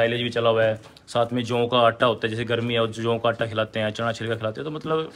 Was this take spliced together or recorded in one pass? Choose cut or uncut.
uncut